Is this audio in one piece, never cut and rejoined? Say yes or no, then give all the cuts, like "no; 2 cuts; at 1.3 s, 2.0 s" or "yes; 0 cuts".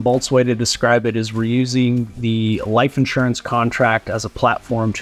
yes; 0 cuts